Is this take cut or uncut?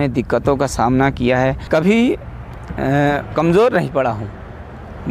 cut